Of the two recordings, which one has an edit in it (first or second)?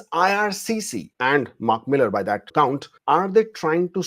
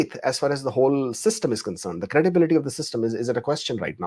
first